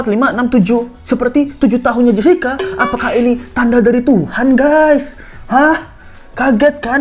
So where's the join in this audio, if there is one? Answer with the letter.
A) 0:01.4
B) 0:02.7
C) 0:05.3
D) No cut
D